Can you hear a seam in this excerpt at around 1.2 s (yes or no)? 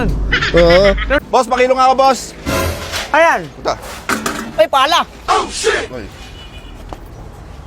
yes